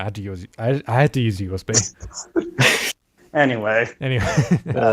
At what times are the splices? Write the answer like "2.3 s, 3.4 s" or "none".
2.9 s